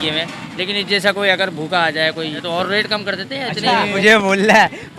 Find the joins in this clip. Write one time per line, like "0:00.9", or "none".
0:02.4
0:03.9